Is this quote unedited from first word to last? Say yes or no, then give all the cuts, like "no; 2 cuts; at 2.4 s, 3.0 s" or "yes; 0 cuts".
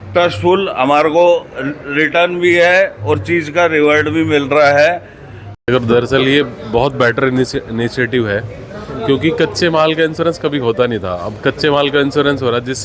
no; 1 cut; at 5.4 s